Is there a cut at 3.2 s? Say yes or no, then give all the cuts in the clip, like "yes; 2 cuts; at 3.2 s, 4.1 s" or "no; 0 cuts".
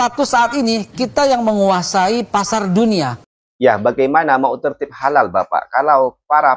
yes; 1 cut; at 3.2 s